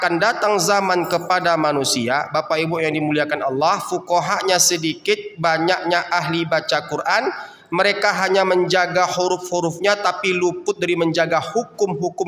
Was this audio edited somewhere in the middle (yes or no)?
no